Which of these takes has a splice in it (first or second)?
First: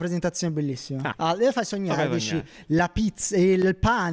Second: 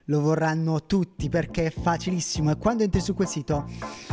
first